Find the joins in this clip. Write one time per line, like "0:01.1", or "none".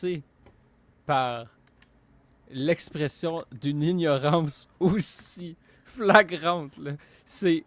none

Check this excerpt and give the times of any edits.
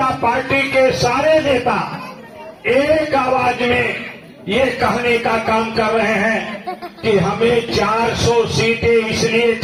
none

